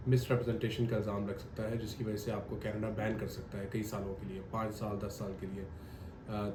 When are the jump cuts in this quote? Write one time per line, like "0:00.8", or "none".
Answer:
none